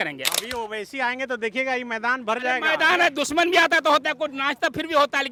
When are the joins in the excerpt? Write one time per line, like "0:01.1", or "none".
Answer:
none

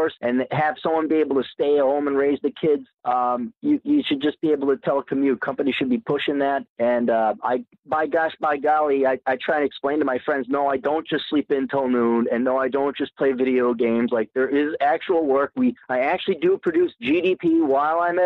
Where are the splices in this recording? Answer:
0:14.7

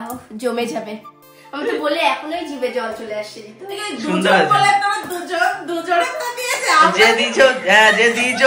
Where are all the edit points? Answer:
none

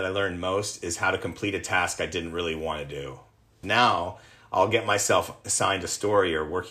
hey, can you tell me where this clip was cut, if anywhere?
0:03.6

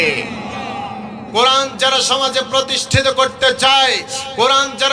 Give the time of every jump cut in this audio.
0:01.1

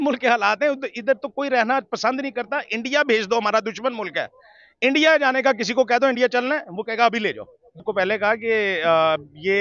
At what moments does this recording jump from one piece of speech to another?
0:07.9

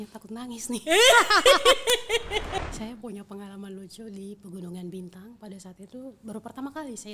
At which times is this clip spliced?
0:02.6

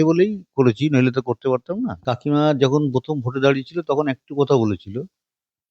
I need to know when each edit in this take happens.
0:02.0

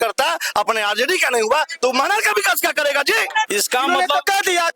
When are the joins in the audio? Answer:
0:03.5

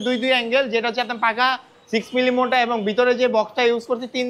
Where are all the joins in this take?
none

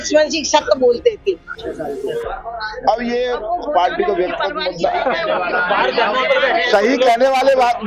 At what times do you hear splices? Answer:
0:01.5

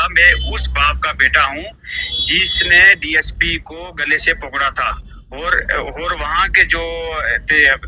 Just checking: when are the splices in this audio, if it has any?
none

